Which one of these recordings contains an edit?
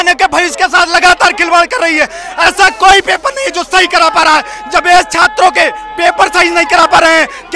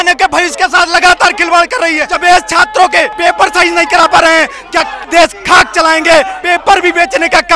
second; 4 cuts; at 2.1 s, 3.1 s, 5.0 s, 6.4 s

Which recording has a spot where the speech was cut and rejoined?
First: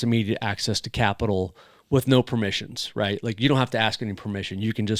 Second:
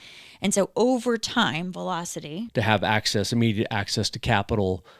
second; 1 cut; at 2.4 s

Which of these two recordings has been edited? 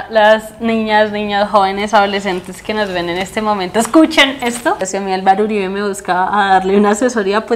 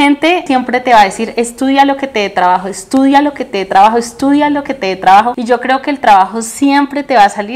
first; 1 cut; at 4.8 s

